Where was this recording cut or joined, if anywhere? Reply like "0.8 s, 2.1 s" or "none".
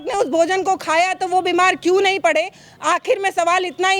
none